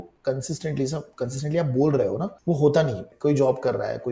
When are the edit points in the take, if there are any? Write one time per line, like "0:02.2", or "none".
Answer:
0:02.3
0:03.1

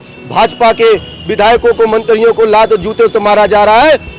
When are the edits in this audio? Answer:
none

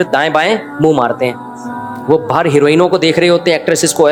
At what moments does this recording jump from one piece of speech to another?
none

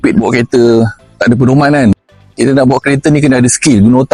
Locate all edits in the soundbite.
none

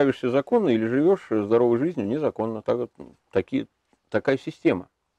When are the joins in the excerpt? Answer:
none

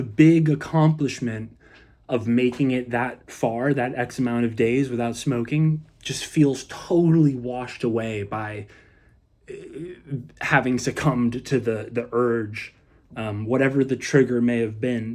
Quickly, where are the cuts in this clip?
none

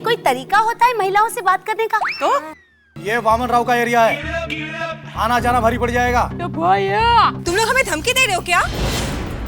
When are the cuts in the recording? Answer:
0:02.9

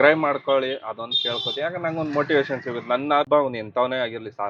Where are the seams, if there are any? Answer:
0:03.3

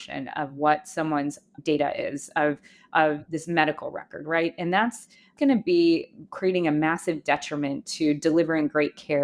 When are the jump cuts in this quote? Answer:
0:01.6

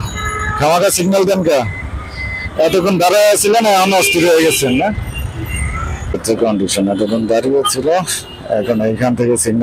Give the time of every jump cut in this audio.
0:06.2

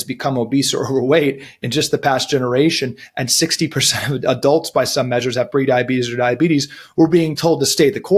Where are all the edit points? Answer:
none

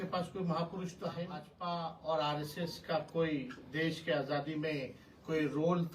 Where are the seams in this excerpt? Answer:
0:01.5

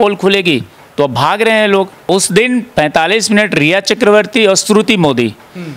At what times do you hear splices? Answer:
0:02.1

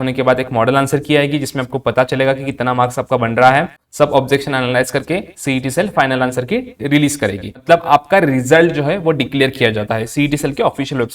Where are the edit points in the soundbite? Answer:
0:03.8
0:07.6

